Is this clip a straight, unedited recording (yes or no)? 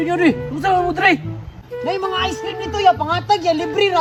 yes